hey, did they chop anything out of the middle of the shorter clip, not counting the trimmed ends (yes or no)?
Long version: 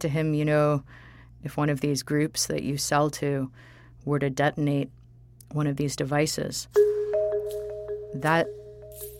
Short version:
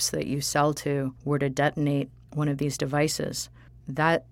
yes